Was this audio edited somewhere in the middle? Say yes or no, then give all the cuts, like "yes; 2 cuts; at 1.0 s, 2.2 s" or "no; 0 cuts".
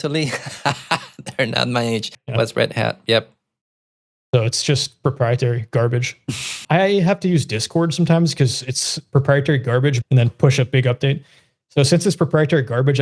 yes; 3 cuts; at 2.2 s, 6.6 s, 10.0 s